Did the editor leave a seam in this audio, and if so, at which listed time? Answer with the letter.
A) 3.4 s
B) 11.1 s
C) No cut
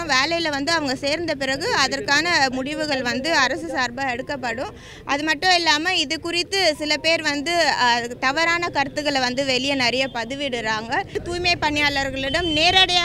B